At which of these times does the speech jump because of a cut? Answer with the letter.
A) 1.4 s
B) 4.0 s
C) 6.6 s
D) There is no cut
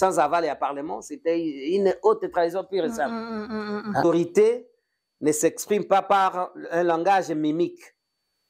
B